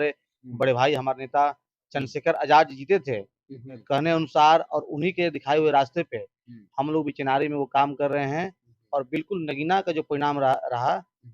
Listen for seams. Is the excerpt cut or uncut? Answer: cut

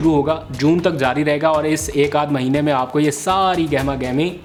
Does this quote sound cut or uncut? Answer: uncut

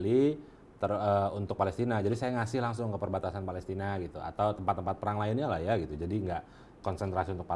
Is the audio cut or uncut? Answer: uncut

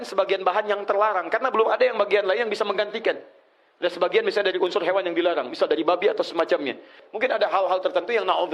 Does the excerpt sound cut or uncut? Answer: cut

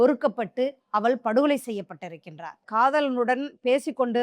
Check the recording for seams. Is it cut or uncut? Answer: cut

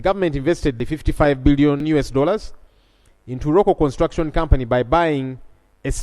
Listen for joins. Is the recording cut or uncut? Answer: cut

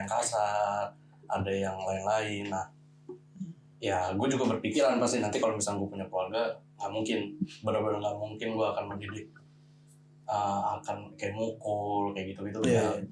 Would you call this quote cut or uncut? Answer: uncut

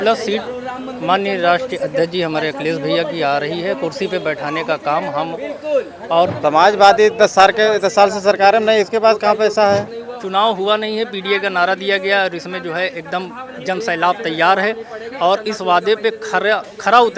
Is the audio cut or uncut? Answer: cut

